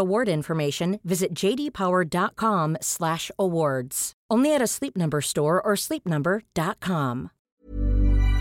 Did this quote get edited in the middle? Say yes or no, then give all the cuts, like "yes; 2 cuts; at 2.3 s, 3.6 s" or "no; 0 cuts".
yes; 1 cut; at 7.4 s